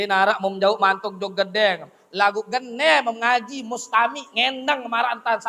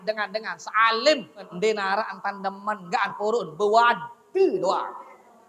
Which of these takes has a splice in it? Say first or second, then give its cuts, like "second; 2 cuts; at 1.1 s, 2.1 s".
second; 1 cut; at 1.5 s